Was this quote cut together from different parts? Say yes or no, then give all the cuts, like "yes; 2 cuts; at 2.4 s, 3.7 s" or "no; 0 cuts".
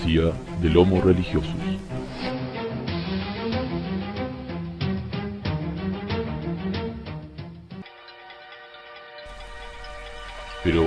no; 0 cuts